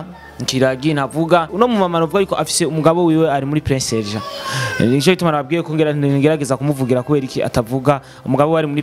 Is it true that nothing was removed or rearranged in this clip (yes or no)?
no